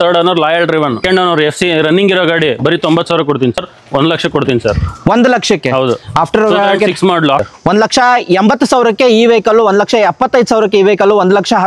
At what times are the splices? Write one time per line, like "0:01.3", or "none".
0:01.0
0:03.6
0:07.4